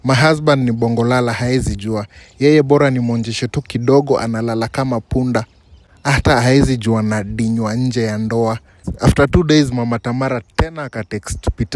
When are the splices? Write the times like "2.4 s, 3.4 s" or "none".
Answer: 8.8 s